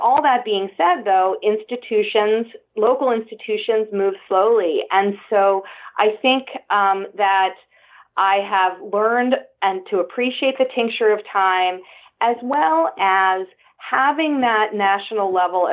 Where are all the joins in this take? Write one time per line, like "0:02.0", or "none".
none